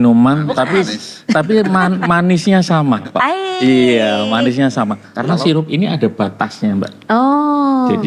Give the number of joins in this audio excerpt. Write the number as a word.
one